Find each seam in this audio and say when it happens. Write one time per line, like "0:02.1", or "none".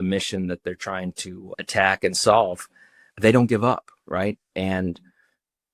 none